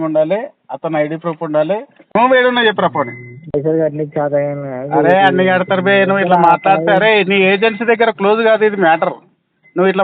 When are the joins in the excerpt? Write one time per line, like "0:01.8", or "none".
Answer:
0:02.0